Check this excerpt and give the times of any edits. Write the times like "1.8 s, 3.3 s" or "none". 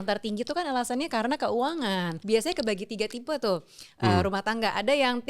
2.2 s